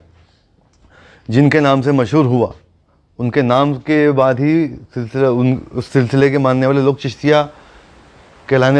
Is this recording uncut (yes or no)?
yes